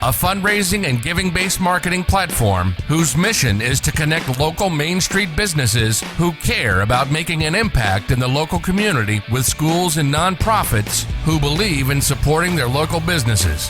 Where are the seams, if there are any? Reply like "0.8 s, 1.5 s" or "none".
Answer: none